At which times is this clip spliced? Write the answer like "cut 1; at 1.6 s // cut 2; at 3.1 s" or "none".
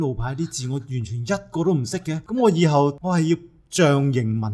cut 1; at 2.2 s // cut 2; at 3.0 s

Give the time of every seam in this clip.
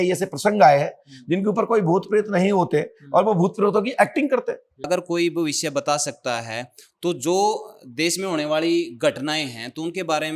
cut 1; at 4.9 s

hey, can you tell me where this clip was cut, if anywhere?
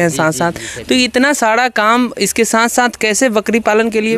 none

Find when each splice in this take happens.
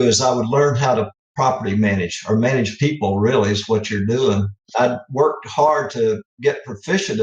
cut 1; at 4.7 s

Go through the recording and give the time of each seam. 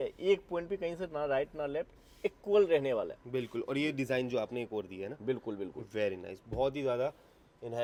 none

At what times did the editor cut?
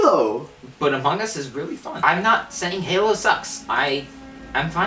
cut 1; at 1.9 s

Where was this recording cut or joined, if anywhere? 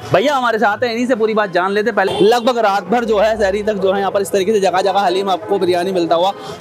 cut 1; at 2.1 s

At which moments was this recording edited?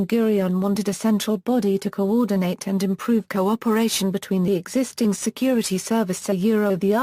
none

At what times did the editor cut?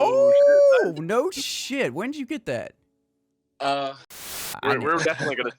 cut 1; at 4.3 s

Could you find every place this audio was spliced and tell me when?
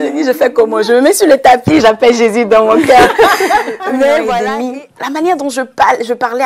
cut 1; at 4.4 s

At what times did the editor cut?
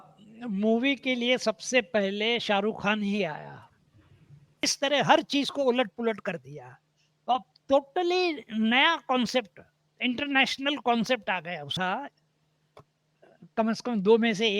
cut 1; at 4.7 s // cut 2; at 11.7 s

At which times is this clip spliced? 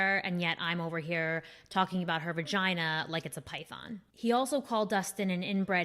cut 1; at 4.1 s

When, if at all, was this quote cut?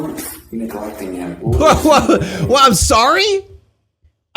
cut 1; at 1.4 s

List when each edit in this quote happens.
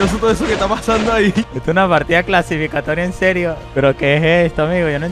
cut 1; at 1.5 s // cut 2; at 3.6 s

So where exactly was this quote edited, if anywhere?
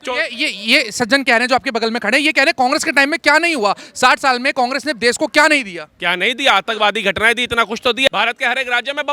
cut 1; at 8.1 s

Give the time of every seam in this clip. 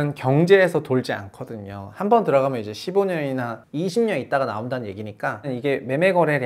cut 1; at 5.5 s

